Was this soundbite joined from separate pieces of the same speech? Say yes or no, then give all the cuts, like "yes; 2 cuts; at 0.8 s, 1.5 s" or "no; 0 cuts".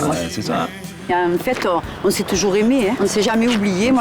yes; 2 cuts; at 0.9 s, 3.0 s